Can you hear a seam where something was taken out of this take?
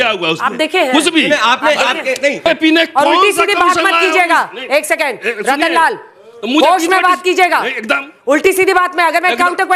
yes; 1 cut; at 2.4 s

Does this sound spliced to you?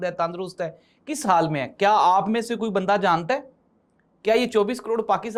no; 0 cuts

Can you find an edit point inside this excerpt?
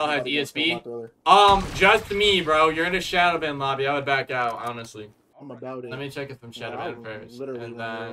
yes; 1 cut; at 5.2 s

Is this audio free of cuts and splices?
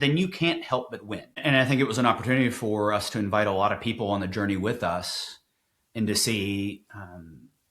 no; 1 cut; at 1.3 s

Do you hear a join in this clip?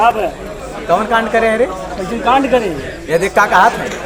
no; 0 cuts

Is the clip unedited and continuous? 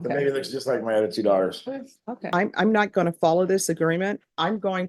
no; 1 cut; at 2.2 s

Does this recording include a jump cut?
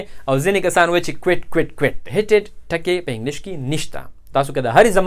yes; 1 cut; at 2.0 s

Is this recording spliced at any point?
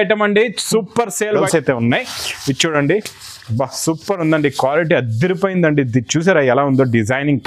yes; 1 cut; at 1.4 s

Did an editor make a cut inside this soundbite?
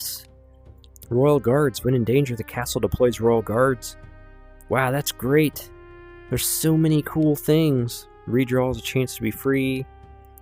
no; 0 cuts

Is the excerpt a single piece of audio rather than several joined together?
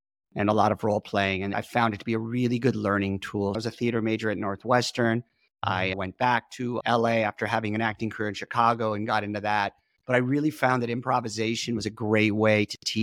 no; 2 cuts; at 1.6 s, 3.6 s

